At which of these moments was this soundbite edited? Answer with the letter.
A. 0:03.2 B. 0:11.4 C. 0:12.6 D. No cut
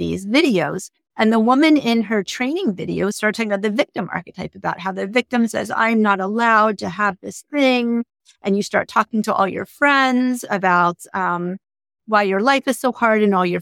A